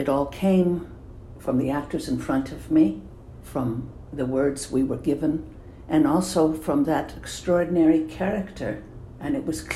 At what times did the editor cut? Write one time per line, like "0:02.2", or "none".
none